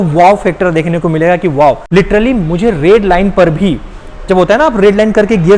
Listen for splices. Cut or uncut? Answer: cut